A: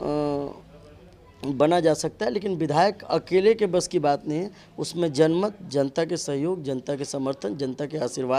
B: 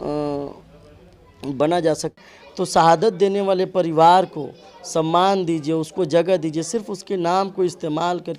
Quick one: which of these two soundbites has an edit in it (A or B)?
B